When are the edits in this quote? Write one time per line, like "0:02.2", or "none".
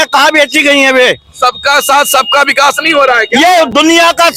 none